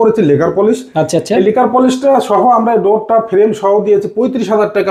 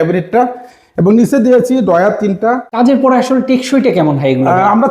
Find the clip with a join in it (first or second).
second